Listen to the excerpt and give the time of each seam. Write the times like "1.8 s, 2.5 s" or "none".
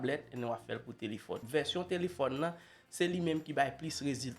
1.4 s

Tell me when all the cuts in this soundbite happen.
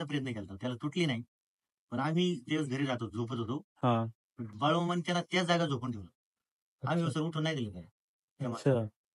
none

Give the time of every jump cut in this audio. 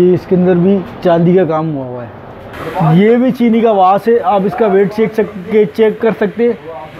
2.6 s

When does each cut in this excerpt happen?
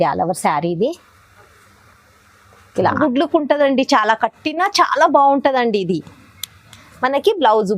3.0 s

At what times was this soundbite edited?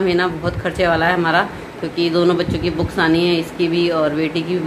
none

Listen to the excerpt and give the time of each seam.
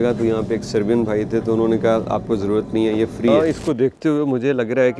3.3 s

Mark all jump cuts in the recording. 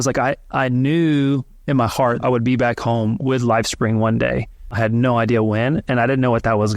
2.2 s, 4.7 s

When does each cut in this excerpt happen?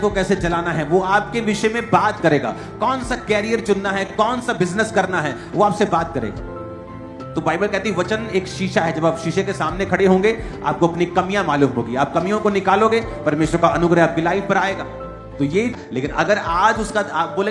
15.8 s

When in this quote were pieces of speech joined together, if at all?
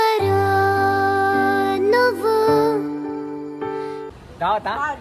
4.0 s

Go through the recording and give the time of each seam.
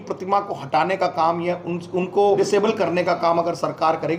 2.4 s

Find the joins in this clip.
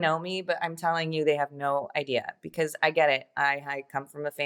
none

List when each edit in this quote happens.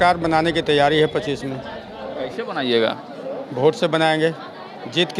none

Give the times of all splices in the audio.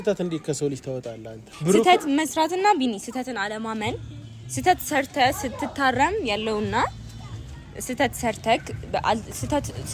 1.5 s

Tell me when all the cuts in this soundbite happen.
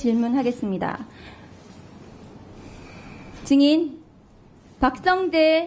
none

